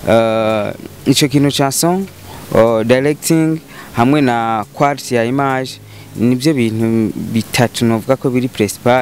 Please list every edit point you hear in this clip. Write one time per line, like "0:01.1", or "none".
none

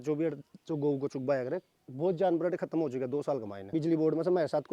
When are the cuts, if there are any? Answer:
0:03.7

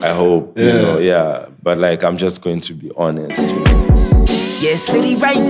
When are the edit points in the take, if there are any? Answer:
0:03.3

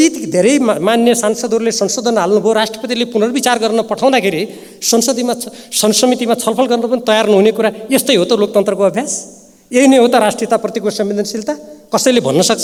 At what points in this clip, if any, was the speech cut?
none

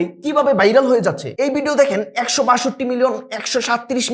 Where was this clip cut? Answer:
none

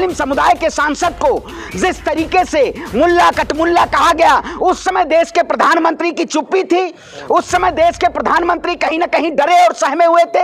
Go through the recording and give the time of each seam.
none

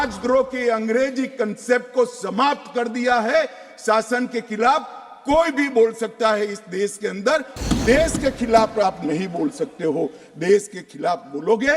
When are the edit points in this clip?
0:07.5

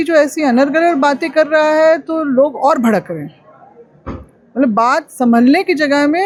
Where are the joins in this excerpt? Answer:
none

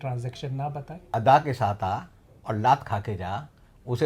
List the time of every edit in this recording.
0:01.0

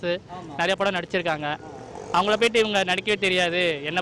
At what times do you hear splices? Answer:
none

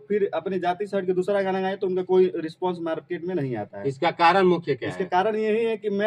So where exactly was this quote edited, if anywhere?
none

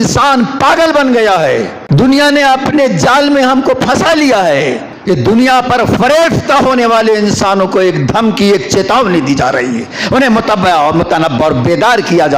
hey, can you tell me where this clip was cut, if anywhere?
0:01.8
0:04.9

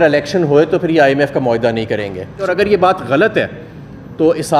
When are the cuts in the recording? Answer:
0:02.5

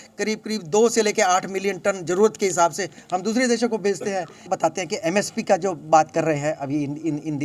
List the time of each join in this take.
0:04.4

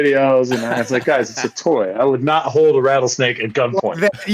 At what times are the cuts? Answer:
none

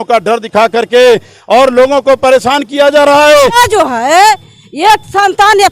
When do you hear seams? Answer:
0:03.6

